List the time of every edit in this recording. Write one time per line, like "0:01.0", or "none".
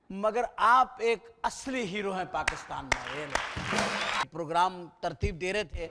0:04.2